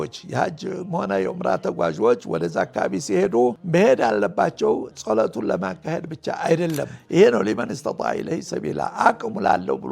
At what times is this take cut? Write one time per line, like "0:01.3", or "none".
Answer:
0:03.6
0:06.9